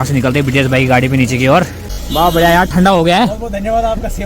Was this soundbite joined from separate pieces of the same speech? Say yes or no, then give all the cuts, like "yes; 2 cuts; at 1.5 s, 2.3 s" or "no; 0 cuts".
yes; 1 cut; at 2.0 s